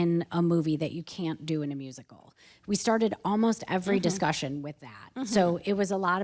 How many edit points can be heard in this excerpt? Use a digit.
0